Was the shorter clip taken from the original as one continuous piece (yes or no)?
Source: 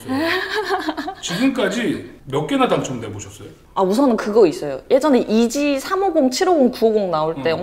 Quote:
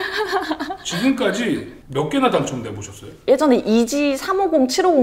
no